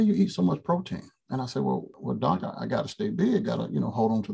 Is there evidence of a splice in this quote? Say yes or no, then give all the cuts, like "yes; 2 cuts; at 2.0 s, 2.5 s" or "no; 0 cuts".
yes; 1 cut; at 1.9 s